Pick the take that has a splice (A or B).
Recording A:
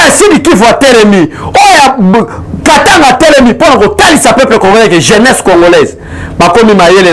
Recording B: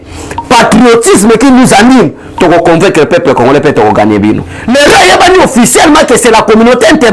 B